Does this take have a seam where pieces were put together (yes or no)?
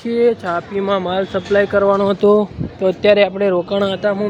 no